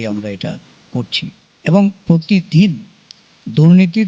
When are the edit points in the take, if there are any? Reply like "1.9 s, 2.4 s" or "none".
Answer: 1.5 s